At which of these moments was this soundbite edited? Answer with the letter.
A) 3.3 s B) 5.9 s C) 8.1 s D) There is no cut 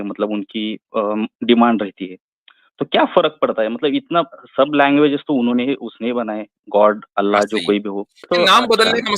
C